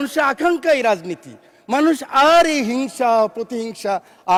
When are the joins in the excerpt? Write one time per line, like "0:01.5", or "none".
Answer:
none